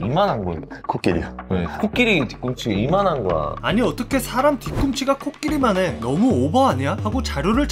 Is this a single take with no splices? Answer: yes; 0 cuts

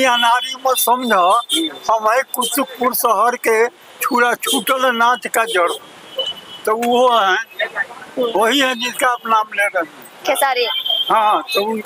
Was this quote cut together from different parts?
no; 0 cuts

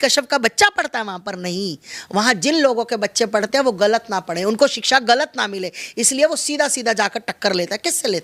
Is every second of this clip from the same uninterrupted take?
yes; 0 cuts

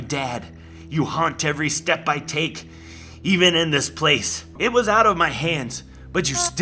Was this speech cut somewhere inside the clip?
yes; 1 cut; at 4.6 s

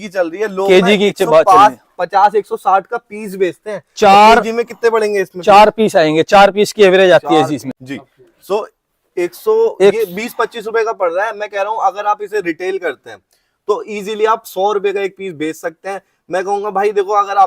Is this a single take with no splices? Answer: no; 1 cut; at 7.8 s

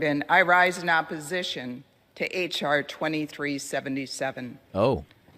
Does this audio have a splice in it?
no; 0 cuts

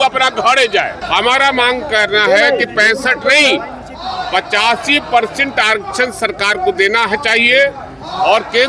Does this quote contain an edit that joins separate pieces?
yes; 1 cut; at 1.0 s

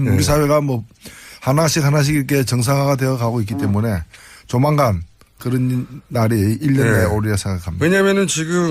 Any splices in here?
yes; 1 cut; at 5.1 s

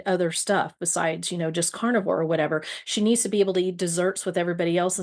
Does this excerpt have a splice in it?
no; 0 cuts

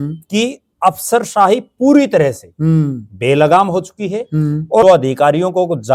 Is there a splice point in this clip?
yes; 1 cut; at 4.8 s

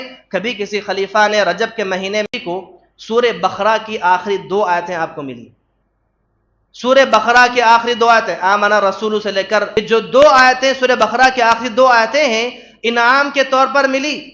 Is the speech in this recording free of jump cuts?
no; 2 cuts; at 2.3 s, 9.8 s

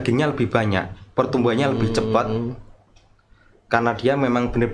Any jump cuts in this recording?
no; 0 cuts

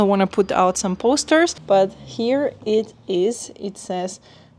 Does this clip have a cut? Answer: yes; 1 cut; at 1.6 s

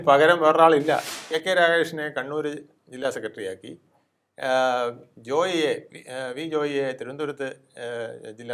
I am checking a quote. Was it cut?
yes; 1 cut; at 1.2 s

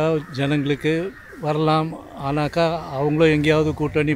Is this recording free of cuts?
no; 1 cut; at 1.2 s

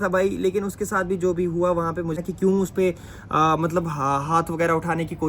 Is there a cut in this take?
yes; 1 cut; at 2.2 s

